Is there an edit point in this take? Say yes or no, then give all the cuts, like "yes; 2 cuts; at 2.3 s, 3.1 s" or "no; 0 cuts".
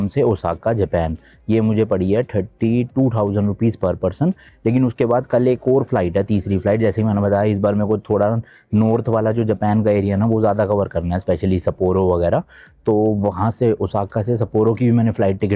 no; 0 cuts